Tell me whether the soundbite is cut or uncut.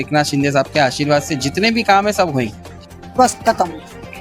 cut